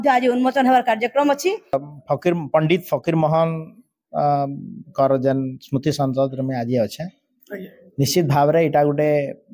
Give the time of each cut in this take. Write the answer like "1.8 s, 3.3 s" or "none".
1.8 s